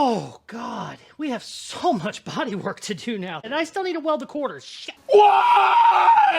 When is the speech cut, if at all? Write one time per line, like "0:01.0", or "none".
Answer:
0:03.5